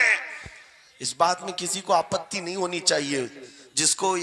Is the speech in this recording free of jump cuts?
yes; 0 cuts

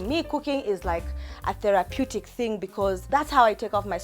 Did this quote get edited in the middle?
yes; 1 cut; at 3.0 s

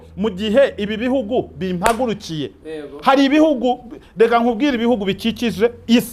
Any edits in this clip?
no; 0 cuts

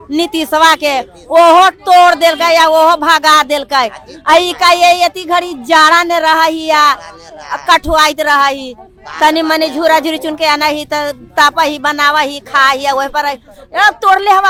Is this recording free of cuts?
yes; 0 cuts

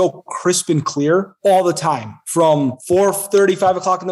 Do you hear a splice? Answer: yes; 2 cuts; at 1.3 s, 2.8 s

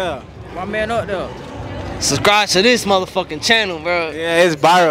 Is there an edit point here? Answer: no; 0 cuts

